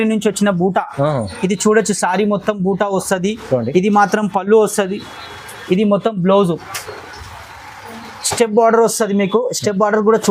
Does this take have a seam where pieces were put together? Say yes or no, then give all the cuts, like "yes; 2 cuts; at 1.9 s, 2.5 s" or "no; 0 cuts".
no; 0 cuts